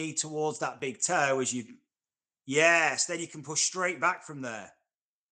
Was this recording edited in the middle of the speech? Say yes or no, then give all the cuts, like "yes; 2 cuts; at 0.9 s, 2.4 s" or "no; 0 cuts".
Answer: no; 0 cuts